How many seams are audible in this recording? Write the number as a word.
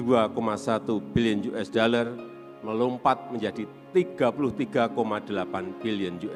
zero